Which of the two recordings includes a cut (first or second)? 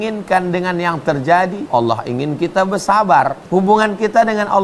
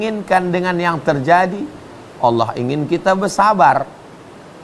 first